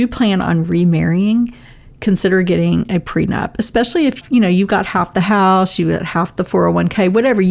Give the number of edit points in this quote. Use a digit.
1